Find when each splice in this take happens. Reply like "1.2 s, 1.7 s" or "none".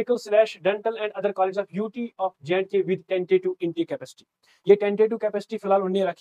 none